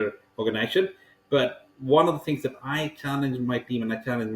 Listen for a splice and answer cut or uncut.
cut